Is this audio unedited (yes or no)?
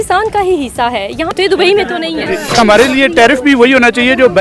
no